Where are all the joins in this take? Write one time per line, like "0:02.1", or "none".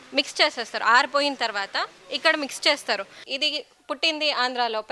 0:03.2